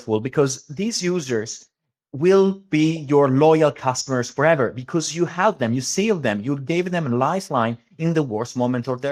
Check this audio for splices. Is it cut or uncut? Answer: uncut